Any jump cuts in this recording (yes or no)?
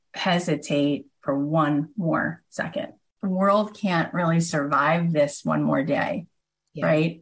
yes